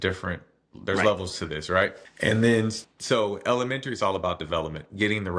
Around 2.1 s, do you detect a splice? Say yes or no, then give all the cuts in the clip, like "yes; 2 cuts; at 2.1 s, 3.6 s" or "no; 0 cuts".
yes; 2 cuts; at 2.1 s, 2.9 s